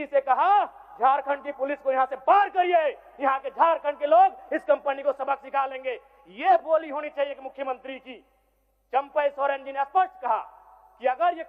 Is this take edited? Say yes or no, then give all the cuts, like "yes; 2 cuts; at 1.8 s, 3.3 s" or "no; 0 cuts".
no; 0 cuts